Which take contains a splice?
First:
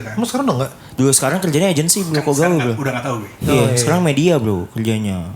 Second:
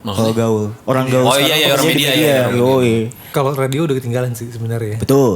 second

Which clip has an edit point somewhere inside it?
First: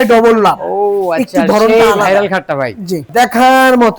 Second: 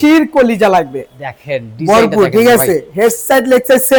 first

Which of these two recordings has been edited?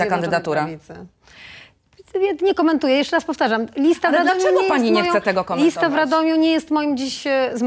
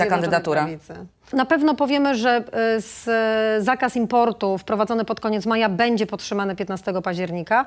second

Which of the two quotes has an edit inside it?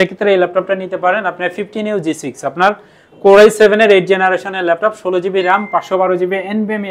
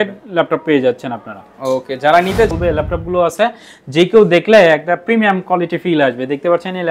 second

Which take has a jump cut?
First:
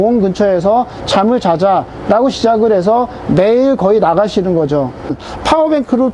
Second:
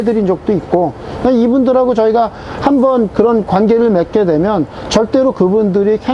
first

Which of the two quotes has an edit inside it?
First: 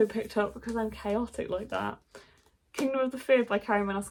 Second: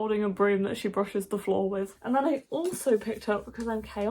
second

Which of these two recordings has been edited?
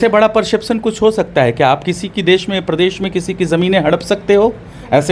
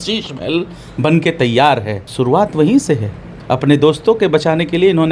second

